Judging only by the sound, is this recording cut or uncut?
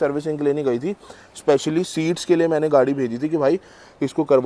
uncut